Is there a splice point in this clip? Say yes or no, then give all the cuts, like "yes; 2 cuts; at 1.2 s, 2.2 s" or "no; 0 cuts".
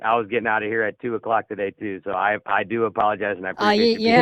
no; 0 cuts